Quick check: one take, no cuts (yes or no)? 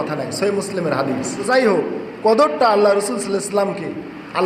no